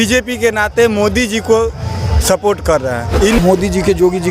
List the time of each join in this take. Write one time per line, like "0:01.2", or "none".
0:03.4